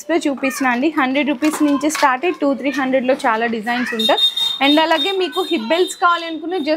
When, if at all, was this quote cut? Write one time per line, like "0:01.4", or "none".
none